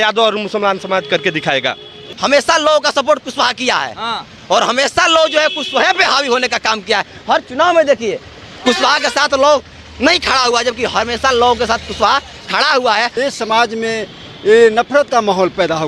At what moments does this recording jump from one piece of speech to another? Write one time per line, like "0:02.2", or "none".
0:02.0
0:13.1